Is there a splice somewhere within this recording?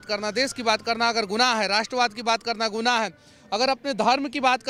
no; 0 cuts

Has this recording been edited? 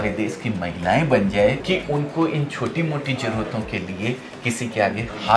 no; 0 cuts

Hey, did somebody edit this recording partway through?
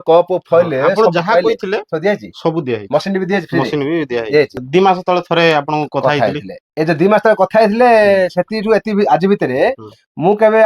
yes; 1 cut; at 4.6 s

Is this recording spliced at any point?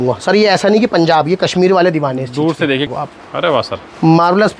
yes; 1 cut; at 3.0 s

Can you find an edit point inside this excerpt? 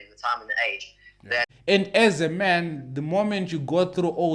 yes; 1 cut; at 1.5 s

